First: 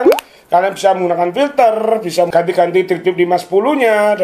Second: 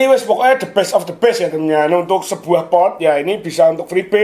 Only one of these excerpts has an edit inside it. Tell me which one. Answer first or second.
first